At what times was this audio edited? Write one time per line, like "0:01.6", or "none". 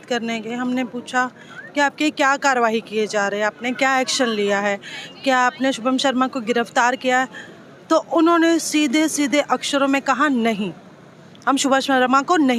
none

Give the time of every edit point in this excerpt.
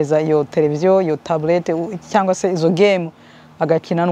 none

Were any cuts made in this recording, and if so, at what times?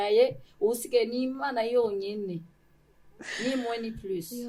none

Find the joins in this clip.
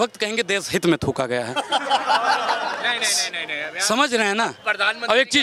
none

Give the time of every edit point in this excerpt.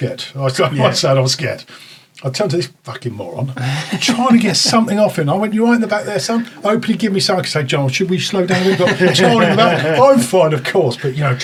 none

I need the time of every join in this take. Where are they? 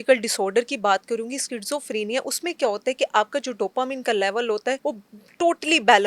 0:04.8

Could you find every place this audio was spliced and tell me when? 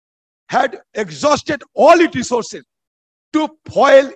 none

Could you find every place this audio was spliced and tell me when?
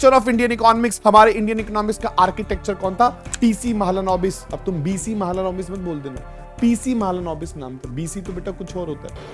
0:00.9
0:04.5

